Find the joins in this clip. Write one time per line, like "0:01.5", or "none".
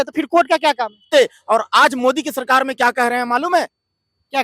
0:01.1